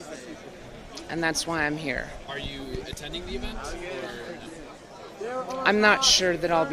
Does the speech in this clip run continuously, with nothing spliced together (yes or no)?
no